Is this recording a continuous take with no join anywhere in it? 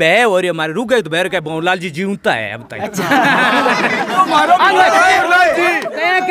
no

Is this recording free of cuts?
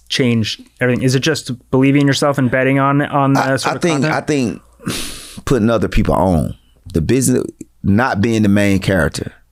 yes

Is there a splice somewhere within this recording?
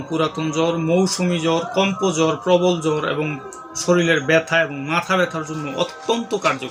no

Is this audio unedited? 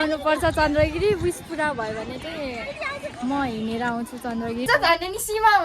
no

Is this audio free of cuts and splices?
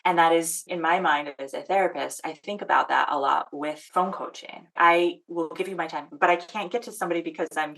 no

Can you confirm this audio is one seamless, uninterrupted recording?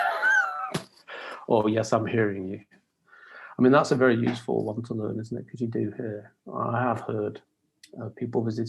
yes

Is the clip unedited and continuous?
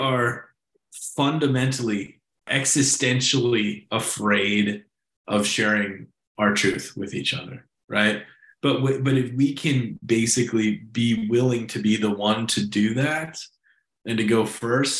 no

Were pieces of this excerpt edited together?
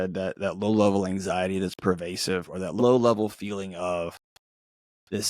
yes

